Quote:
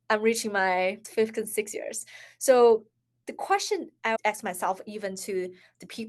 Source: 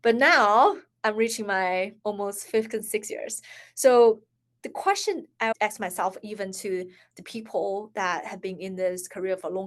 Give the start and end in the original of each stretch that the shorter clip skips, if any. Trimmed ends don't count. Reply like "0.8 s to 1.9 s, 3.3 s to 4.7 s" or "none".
2.0 s to 2.4 s